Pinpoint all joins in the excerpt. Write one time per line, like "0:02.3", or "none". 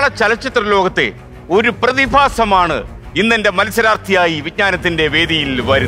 none